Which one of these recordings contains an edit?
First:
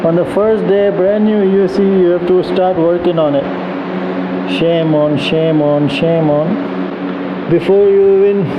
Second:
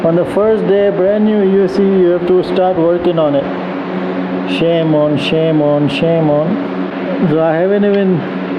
first; 1 cut; at 6.9 s

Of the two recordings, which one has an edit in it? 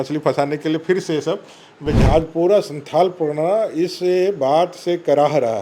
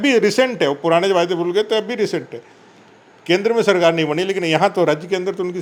first; 1 cut; at 2.0 s

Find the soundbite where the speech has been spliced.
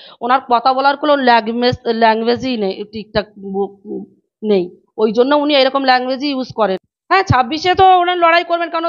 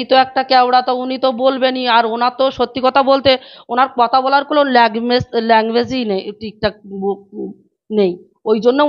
first; 1 cut; at 6.9 s

